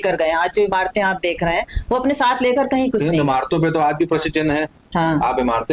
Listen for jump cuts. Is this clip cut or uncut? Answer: uncut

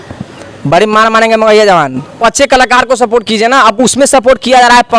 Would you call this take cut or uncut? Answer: cut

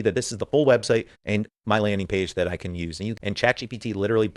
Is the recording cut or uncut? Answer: cut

